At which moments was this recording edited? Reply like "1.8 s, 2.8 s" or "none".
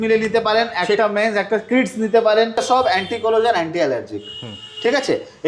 2.6 s

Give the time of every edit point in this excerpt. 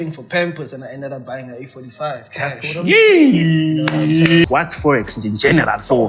4.4 s

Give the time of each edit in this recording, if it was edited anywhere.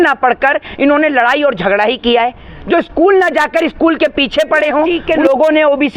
5.0 s

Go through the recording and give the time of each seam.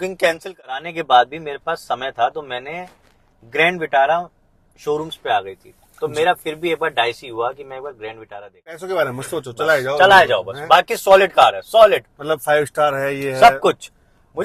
0.9 s, 8.8 s

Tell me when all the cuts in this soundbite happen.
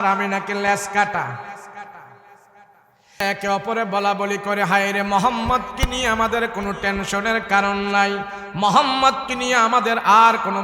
3.2 s

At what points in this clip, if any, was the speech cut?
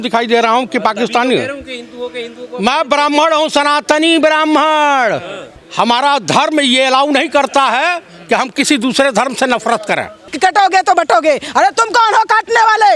10.2 s

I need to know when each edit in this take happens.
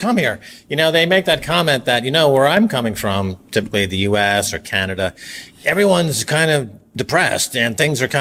none

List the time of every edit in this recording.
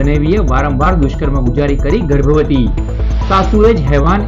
none

